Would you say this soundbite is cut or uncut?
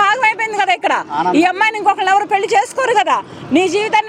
uncut